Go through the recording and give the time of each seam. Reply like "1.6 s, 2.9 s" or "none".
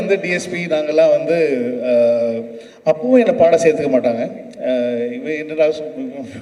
none